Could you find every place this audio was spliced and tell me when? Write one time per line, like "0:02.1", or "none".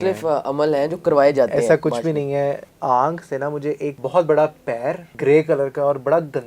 0:02.6
0:04.0
0:05.1

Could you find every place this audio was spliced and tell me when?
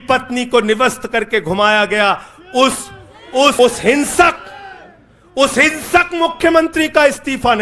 0:03.6

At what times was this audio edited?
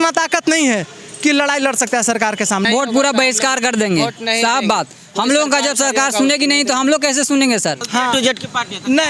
0:02.6
0:07.8

